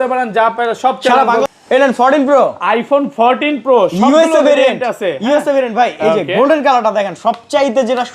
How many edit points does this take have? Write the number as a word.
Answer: one